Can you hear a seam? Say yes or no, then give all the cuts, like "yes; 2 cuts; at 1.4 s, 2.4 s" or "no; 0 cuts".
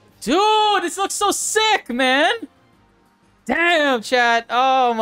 no; 0 cuts